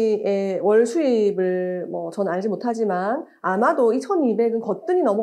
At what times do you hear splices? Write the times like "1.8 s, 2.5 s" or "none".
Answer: none